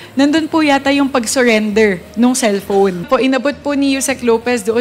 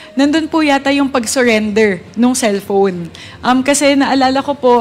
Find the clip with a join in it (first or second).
first